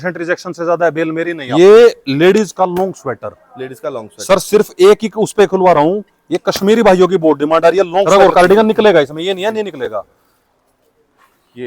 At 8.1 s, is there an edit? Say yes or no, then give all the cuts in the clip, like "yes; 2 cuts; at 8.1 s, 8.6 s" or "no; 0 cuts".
yes; 2 cuts; at 1.4 s, 8.1 s